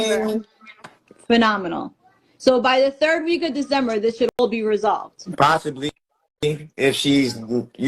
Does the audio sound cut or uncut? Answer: uncut